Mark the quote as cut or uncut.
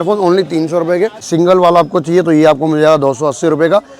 cut